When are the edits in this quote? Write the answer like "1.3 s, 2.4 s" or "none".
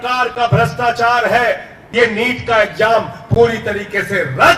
1.8 s